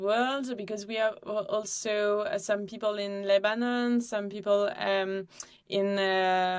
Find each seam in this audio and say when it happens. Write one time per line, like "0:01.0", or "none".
none